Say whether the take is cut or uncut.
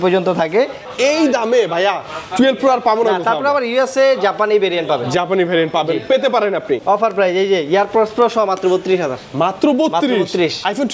cut